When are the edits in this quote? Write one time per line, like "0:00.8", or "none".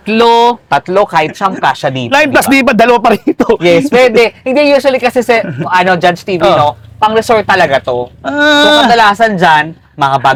none